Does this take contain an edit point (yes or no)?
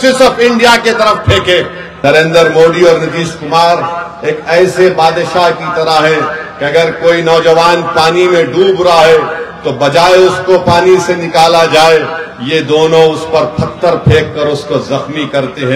yes